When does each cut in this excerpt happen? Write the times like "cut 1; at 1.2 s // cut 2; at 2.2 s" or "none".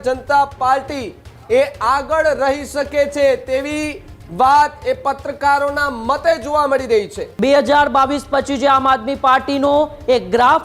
cut 1; at 7.2 s